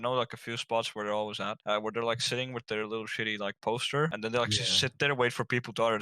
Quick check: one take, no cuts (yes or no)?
no